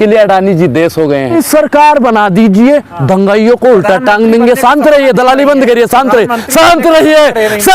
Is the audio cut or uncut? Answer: cut